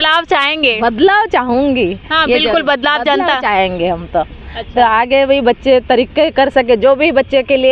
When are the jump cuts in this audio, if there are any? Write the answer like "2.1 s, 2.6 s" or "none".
none